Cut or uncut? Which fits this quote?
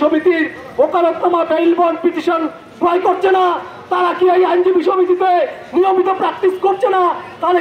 uncut